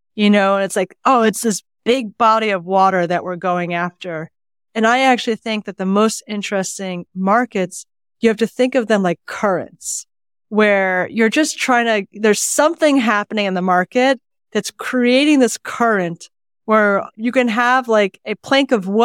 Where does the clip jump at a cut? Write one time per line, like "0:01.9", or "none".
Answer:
0:17.1